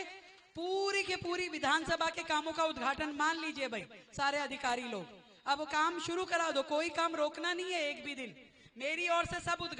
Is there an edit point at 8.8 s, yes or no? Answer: no